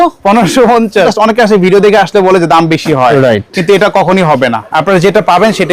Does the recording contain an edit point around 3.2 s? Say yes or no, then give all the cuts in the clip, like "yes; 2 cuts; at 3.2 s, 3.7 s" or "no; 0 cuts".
no; 2 cuts; at 1.1 s, 4.6 s